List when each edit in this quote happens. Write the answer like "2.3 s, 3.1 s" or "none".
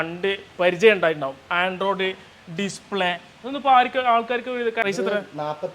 4.8 s